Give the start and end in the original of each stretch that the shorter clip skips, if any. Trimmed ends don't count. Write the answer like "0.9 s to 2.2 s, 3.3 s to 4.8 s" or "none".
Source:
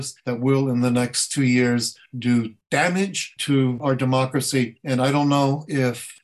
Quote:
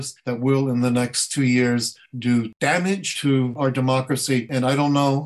2.7 s to 3.0 s, 4.7 s to 4.8 s

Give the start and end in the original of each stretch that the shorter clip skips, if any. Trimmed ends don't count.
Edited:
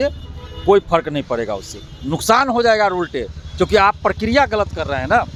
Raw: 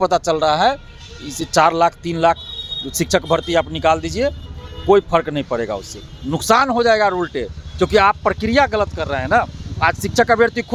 none

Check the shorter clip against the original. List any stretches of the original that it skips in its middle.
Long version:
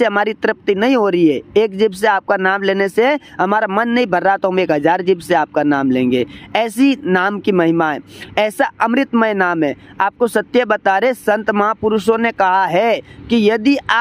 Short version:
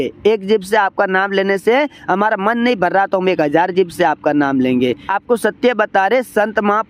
6.4 s to 10.0 s

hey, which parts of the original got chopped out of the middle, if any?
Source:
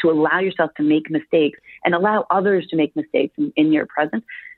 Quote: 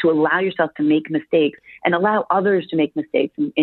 none

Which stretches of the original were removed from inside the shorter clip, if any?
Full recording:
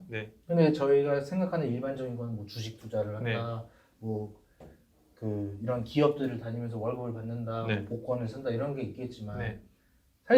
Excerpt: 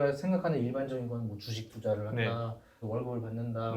3.9 s to 6.7 s

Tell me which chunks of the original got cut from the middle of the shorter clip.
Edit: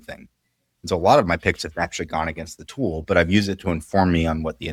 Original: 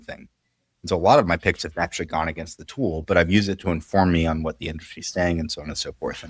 none

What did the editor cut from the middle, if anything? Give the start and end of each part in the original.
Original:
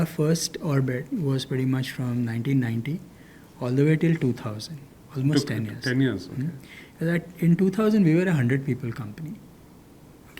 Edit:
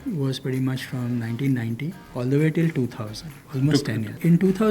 3.0 s to 3.4 s, 5.0 s to 6.7 s

